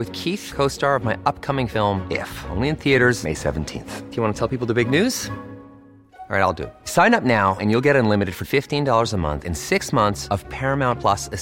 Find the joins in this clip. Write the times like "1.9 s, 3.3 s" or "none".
none